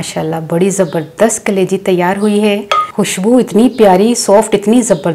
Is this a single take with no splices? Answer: no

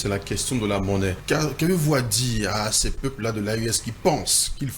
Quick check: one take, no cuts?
no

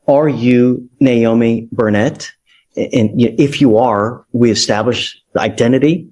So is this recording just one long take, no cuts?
yes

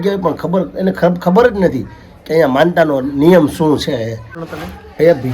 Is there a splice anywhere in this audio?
yes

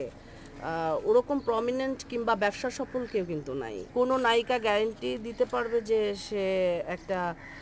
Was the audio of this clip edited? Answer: yes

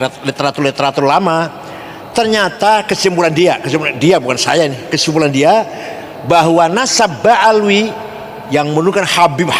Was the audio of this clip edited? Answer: no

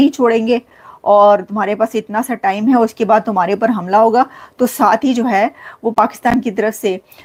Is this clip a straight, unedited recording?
yes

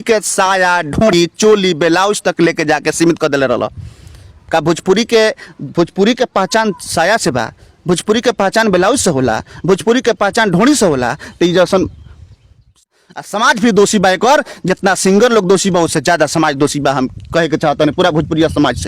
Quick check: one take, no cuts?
no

